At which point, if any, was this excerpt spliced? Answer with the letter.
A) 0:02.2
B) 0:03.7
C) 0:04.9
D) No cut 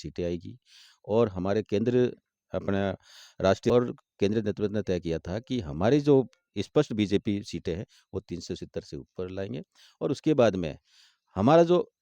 B